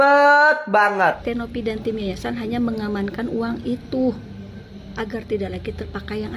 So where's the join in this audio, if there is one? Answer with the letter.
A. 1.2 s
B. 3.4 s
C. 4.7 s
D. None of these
A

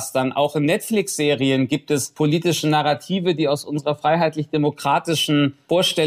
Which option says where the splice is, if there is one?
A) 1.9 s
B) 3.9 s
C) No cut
C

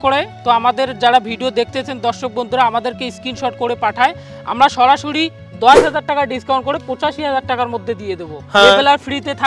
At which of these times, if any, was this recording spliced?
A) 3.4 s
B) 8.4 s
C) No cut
B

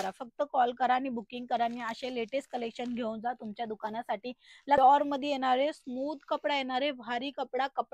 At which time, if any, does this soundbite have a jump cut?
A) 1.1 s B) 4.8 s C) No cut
B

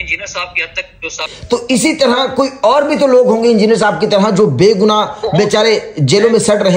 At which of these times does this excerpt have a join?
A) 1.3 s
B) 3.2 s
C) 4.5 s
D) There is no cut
A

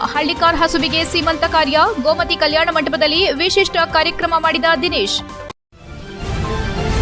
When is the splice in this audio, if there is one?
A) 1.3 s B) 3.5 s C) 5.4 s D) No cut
C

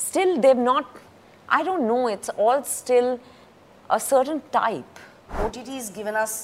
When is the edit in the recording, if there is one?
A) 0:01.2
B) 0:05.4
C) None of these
B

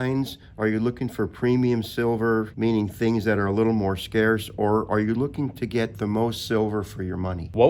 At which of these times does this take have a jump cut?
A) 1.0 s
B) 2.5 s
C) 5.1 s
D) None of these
B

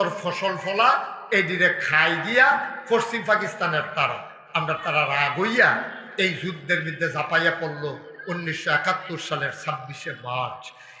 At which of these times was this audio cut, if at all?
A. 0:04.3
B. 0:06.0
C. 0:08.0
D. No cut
D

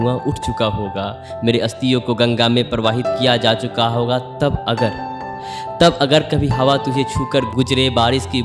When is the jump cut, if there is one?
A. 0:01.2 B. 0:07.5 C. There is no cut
B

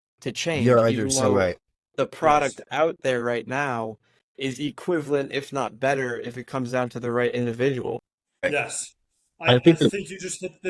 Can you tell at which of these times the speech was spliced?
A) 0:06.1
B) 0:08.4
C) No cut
B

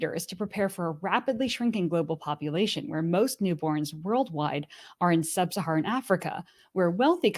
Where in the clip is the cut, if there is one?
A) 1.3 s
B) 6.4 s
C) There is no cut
C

